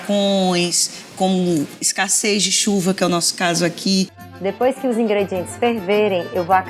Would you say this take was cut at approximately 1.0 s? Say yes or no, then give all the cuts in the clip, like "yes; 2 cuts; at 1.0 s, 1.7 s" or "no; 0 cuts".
no; 1 cut; at 4.2 s